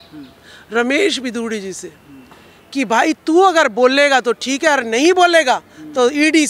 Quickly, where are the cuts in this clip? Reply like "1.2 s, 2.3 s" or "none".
none